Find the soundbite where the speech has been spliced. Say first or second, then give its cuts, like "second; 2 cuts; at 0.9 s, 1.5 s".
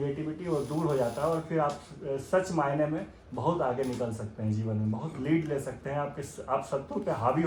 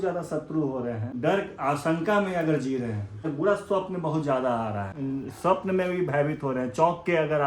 second; 3 cuts; at 1.1 s, 3.2 s, 4.9 s